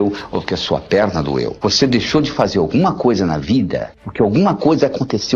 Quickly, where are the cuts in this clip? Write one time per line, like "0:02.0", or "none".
0:01.5